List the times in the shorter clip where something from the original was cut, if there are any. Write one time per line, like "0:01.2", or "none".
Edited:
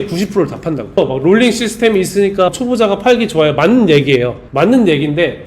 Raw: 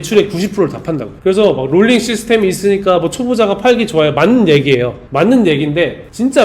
0:01.0
0:02.5

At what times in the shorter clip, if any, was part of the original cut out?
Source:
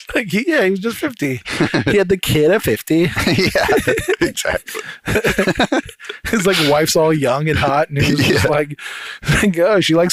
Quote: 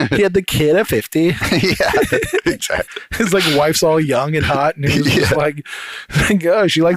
0:03.0

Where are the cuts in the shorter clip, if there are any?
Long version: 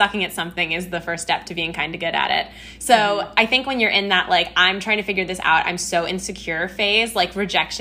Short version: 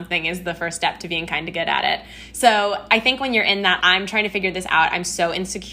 0:03.8

